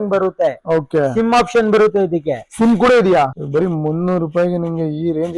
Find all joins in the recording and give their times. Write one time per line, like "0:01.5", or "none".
0:03.3